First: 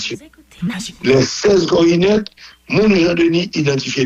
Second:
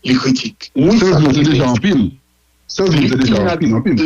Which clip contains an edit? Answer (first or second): second